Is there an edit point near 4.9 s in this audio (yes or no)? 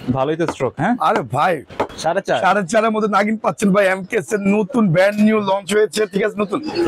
no